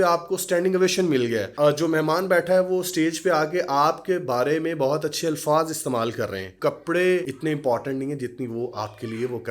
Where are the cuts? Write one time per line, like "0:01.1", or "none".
0:01.5
0:06.5
0:07.3